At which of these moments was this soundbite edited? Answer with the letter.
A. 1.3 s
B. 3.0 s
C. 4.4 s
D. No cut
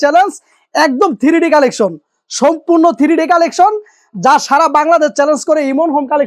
D